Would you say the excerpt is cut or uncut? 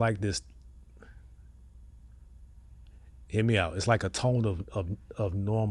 uncut